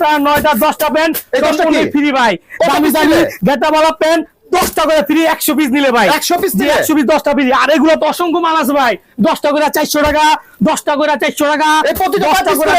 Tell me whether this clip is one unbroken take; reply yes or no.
yes